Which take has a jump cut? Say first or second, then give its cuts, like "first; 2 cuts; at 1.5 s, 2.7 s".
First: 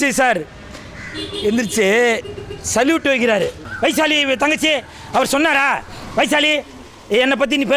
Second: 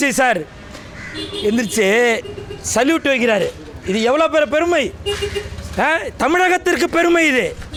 first; 1 cut; at 3.6 s